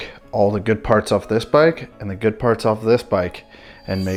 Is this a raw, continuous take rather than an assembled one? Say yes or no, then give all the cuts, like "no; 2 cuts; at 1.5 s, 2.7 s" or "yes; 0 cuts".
yes; 0 cuts